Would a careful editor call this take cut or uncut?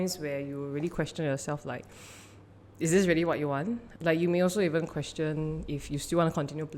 uncut